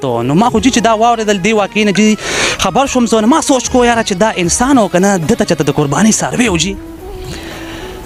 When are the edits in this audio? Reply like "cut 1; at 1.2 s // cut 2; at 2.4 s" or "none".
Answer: none